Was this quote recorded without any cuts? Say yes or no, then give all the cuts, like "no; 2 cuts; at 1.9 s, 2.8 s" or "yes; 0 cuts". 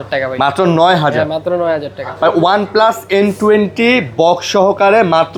yes; 0 cuts